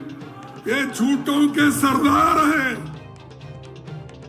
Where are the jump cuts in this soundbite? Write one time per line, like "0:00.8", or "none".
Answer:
none